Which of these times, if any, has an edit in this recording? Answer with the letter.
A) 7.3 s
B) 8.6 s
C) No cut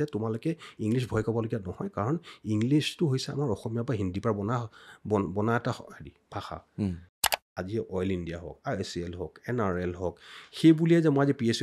A